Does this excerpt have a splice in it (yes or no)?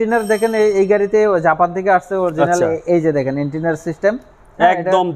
no